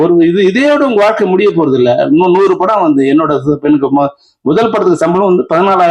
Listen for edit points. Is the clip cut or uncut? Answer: uncut